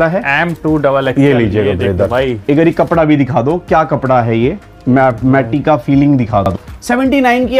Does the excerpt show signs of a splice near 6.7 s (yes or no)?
yes